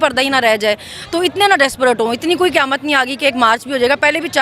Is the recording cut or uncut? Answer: uncut